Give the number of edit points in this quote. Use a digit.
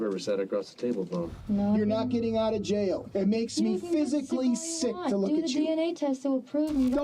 2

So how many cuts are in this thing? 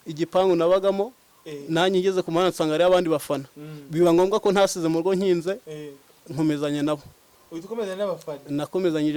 0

